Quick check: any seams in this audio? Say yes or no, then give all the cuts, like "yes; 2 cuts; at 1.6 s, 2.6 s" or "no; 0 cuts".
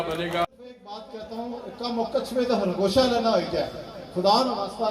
yes; 1 cut; at 1.0 s